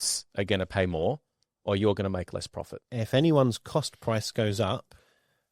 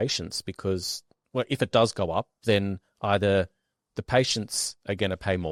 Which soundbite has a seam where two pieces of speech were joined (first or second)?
first